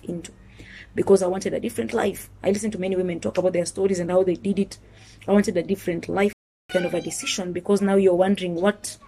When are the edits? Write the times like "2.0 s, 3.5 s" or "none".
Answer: 6.6 s